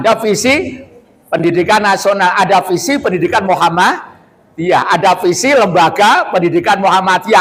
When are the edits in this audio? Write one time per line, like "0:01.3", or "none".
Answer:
none